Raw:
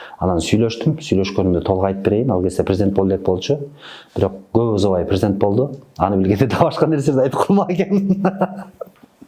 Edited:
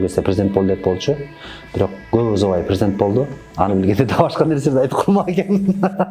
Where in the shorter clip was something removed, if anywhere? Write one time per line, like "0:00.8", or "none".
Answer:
none